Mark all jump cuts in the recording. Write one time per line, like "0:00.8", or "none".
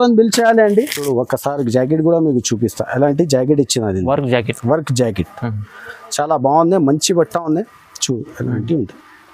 0:01.0